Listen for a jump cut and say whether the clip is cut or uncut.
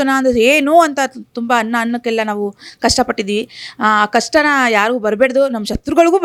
uncut